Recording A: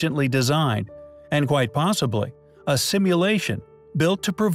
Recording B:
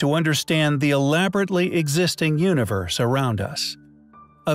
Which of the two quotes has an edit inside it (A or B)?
A